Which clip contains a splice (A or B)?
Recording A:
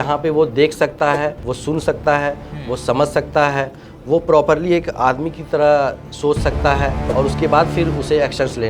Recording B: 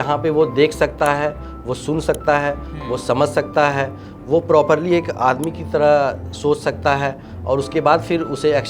A